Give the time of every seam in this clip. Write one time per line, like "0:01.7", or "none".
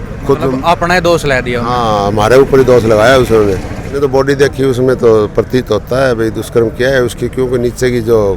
0:03.9